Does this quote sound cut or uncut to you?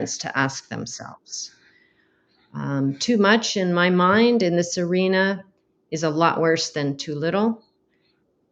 uncut